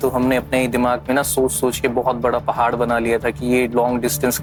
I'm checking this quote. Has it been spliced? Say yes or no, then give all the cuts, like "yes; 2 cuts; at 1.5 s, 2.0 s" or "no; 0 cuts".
no; 0 cuts